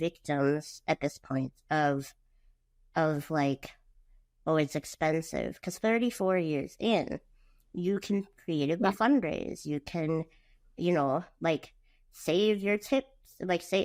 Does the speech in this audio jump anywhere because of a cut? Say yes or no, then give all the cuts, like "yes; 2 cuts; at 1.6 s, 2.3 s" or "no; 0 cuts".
no; 0 cuts